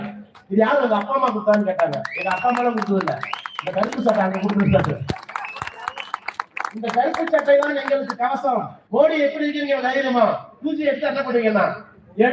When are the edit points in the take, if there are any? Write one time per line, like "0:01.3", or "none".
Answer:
0:08.8